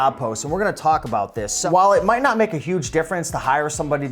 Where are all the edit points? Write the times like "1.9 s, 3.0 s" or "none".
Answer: 1.6 s